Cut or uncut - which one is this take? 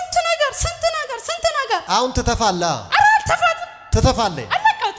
cut